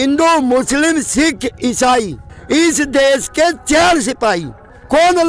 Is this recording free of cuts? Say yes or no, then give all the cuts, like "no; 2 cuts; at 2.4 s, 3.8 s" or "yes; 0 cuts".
yes; 0 cuts